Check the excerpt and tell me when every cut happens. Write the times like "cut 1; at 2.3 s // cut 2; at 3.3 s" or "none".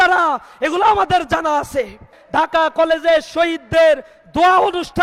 cut 1; at 2.2 s

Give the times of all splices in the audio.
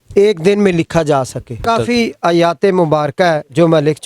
cut 1; at 1.7 s

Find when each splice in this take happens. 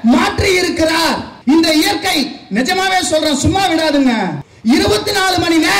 none

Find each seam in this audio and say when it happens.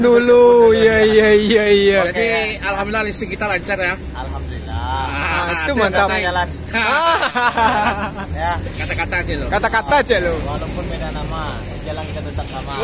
none

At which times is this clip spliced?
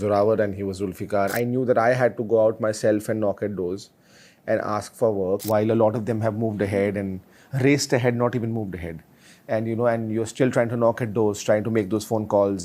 cut 1; at 1.3 s // cut 2; at 5.4 s

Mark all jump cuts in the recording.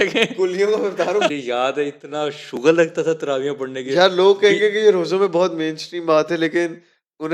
cut 1; at 1.3 s

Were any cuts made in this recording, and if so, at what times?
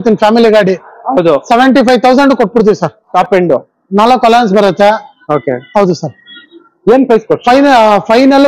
cut 1; at 3.1 s

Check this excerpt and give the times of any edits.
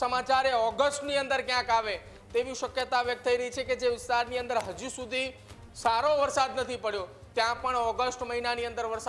none

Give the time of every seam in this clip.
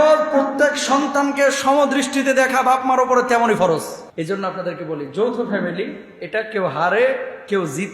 cut 1; at 4.0 s

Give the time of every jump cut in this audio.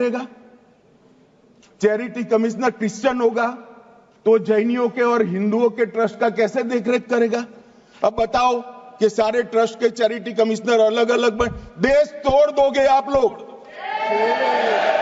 none

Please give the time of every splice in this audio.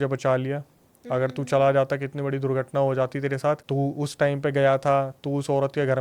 cut 1; at 3.6 s

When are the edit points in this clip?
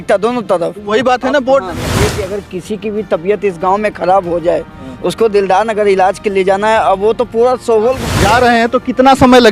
cut 1; at 2.1 s // cut 2; at 8.1 s

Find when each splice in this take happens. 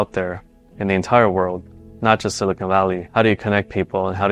none

